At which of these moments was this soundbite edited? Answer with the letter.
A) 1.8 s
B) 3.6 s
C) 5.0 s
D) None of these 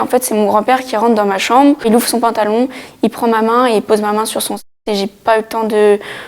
A